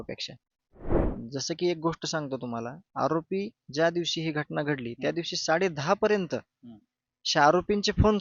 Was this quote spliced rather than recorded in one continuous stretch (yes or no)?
yes